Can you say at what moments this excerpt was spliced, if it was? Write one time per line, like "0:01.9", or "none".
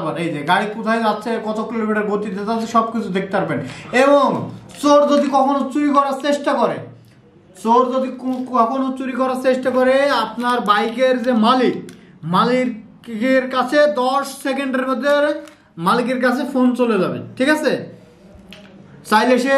none

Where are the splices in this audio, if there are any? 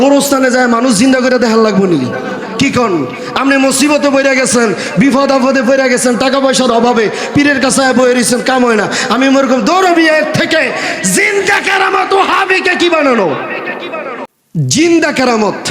0:14.3

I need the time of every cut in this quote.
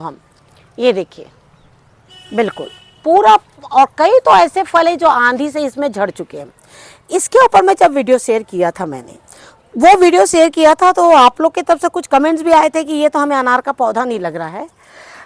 none

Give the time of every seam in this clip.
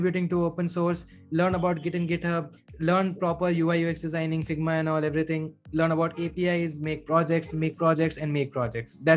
none

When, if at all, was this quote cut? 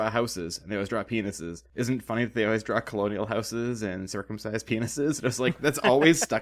0:01.5

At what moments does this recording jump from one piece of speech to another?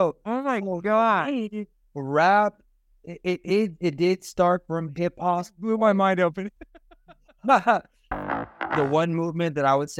0:08.3

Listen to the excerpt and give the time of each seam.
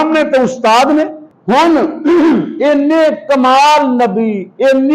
0:01.3

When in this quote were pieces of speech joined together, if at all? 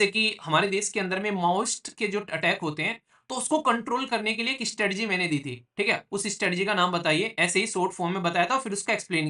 none

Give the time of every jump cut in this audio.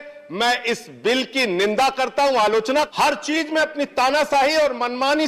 0:02.9

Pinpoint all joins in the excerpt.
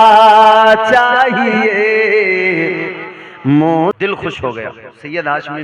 0:03.9

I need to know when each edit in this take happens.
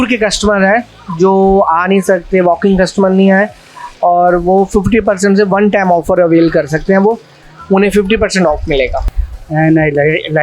0:09.1

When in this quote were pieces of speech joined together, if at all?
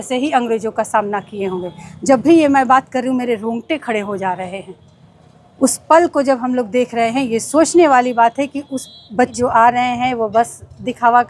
0:09.3

